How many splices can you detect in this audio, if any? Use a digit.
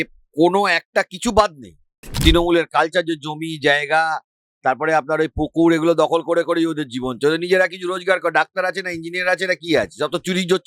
1